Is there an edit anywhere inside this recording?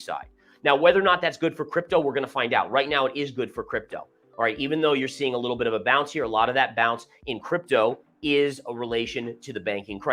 no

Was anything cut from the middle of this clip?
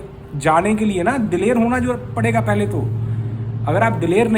no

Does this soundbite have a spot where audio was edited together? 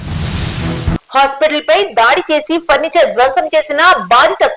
no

